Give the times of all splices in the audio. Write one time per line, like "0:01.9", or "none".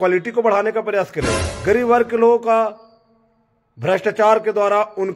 0:01.4